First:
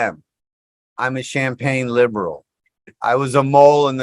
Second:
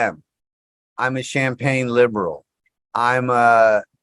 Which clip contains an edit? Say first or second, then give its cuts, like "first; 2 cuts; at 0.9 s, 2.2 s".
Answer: first; 1 cut; at 2.9 s